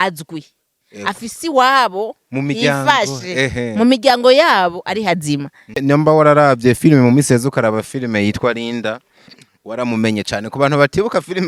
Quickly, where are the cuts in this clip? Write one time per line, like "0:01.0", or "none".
0:05.8